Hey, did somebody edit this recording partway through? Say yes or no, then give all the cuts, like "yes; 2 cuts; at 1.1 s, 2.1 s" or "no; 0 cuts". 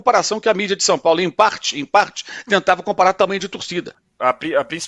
yes; 1 cut; at 4.0 s